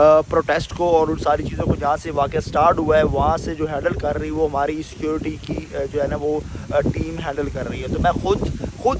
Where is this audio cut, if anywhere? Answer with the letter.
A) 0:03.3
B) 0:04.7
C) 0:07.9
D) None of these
D